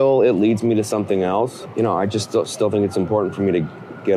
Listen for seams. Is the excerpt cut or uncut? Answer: cut